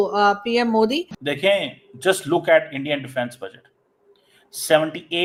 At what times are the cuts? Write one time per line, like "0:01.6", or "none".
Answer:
none